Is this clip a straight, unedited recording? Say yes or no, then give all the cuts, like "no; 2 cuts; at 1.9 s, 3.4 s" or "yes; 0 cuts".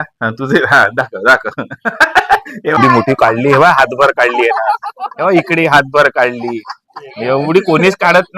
no; 1 cut; at 2.8 s